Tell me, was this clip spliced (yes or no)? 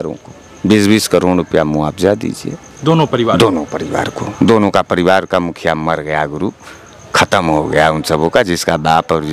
no